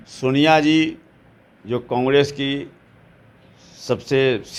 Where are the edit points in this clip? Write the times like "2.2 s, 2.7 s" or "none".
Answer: none